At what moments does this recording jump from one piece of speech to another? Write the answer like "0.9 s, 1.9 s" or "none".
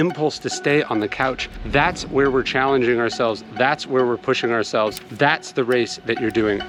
none